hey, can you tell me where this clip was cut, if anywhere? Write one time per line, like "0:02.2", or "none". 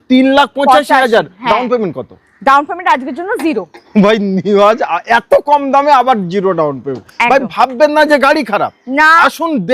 none

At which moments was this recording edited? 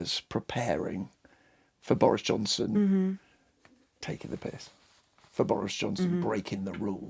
none

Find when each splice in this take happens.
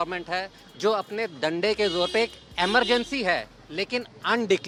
none

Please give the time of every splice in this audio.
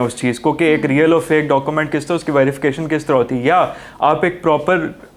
none

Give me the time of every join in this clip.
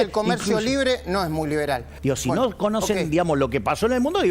0:01.9

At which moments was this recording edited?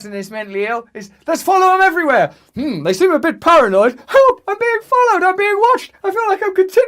none

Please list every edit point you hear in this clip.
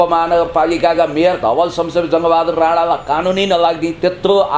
none

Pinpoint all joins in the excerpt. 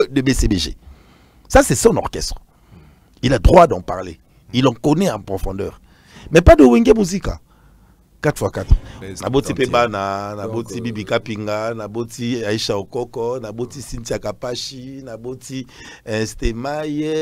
0:08.9

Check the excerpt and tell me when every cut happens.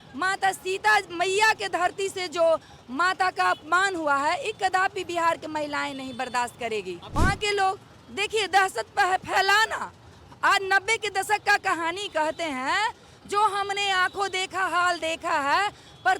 0:07.0

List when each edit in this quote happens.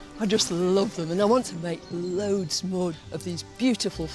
0:01.6

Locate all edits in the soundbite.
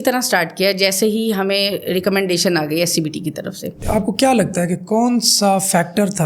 0:03.8

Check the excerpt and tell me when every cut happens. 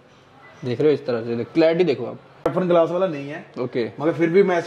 0:02.5

